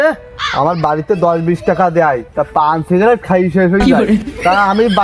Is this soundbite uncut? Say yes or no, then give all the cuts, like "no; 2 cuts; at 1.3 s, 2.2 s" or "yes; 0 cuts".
yes; 0 cuts